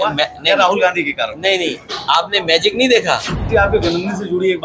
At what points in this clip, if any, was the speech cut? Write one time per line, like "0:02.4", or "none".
0:03.4

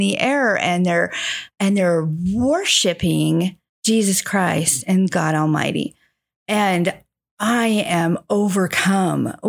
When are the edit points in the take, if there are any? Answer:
none

